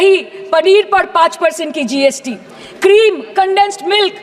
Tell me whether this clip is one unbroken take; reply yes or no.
yes